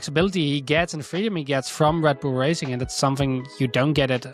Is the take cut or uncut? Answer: uncut